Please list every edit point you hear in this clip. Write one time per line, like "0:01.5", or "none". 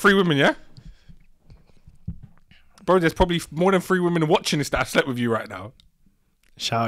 none